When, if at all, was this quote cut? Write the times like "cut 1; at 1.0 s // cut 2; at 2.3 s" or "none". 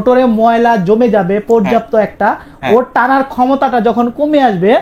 none